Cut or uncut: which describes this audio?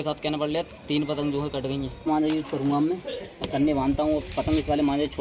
cut